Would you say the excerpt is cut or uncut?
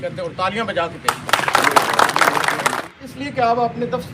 cut